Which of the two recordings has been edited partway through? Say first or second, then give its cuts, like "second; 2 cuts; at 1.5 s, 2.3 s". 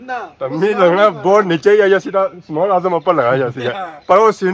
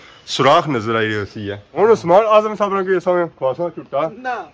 second; 1 cut; at 1.6 s